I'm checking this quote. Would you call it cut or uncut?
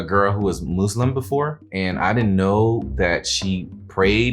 cut